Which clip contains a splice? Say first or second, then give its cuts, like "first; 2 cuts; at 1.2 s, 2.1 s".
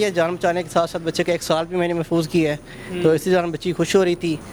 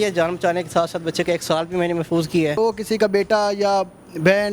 second; 1 cut; at 2.6 s